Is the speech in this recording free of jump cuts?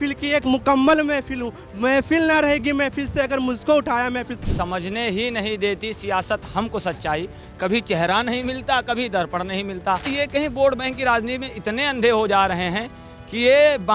no; 2 cuts; at 4.4 s, 10.1 s

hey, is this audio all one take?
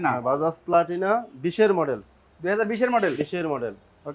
yes; 0 cuts

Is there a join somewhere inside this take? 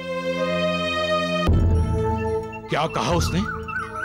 yes; 1 cut; at 1.5 s

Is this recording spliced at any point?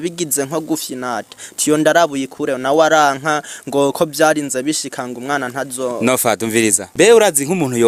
no; 0 cuts

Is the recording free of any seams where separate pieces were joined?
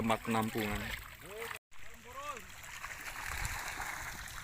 no; 1 cut; at 1.6 s

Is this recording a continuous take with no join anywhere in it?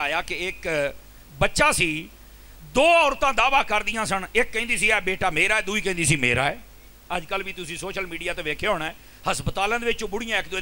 yes; 0 cuts

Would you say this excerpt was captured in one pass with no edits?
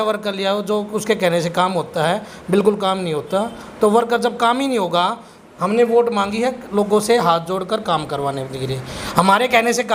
yes; 0 cuts

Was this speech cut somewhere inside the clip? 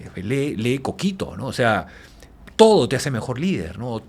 no; 0 cuts

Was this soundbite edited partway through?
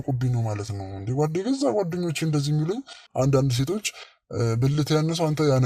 yes; 1 cut; at 3.0 s

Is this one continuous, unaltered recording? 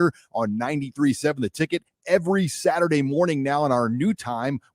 yes; 0 cuts

